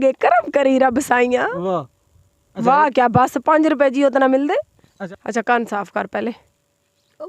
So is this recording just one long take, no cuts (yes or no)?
no